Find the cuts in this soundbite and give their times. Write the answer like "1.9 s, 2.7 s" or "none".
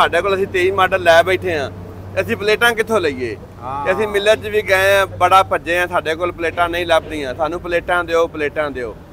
none